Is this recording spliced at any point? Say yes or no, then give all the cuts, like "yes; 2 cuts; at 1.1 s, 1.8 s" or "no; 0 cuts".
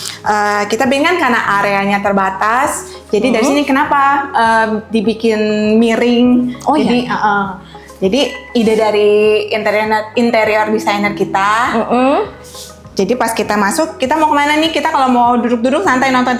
no; 0 cuts